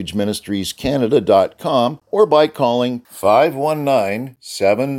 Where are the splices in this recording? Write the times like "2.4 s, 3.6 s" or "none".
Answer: 2.0 s